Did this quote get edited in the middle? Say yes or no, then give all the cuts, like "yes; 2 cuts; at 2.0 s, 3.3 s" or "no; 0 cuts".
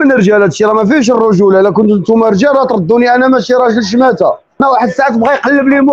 yes; 1 cut; at 4.6 s